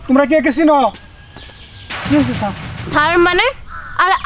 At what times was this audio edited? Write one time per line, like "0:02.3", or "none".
0:01.1